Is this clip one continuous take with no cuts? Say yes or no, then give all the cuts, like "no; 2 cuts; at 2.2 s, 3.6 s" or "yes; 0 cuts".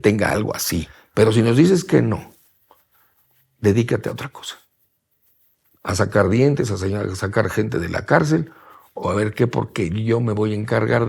no; 1 cut; at 1.0 s